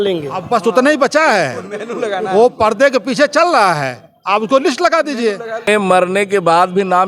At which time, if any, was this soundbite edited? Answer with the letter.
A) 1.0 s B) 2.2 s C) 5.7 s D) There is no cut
C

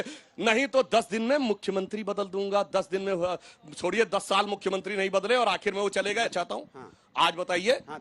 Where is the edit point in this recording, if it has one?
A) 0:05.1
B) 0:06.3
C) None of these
B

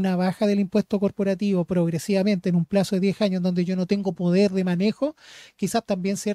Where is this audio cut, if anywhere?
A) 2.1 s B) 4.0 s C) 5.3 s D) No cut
D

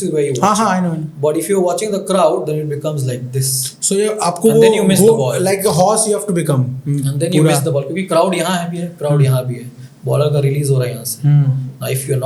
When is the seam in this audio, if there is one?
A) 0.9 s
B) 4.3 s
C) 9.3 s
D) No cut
D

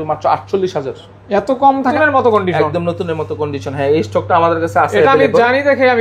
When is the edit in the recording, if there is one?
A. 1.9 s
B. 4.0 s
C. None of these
A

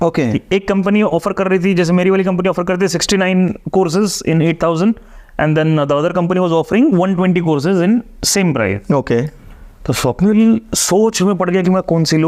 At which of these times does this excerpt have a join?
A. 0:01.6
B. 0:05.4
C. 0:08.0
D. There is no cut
D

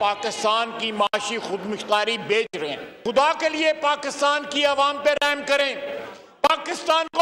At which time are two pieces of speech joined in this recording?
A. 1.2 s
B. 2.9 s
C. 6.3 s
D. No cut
B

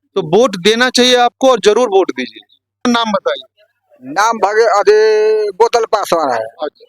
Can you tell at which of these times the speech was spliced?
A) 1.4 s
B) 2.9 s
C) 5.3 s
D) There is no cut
B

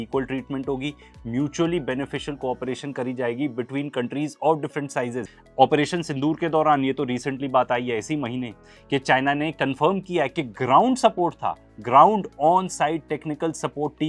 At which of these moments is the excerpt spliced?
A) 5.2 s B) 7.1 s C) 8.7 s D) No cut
A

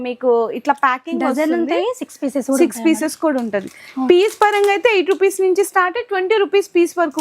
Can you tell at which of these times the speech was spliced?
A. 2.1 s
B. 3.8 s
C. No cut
C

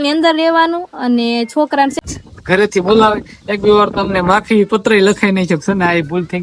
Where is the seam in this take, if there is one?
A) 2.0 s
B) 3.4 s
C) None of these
A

